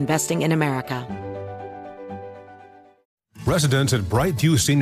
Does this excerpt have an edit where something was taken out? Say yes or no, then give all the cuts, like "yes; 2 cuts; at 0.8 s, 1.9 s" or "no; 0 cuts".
yes; 2 cuts; at 1.0 s, 3.1 s